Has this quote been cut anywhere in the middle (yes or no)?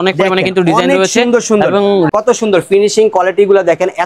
yes